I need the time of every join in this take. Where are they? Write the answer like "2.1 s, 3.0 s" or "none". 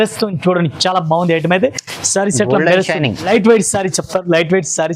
3.2 s